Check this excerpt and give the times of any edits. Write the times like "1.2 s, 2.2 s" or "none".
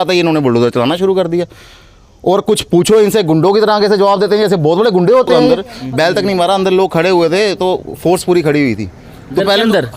5.5 s